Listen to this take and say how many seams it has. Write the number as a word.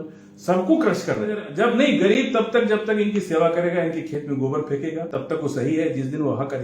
two